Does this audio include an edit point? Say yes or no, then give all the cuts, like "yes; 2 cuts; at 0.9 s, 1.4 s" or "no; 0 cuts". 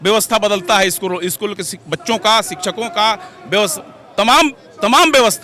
no; 0 cuts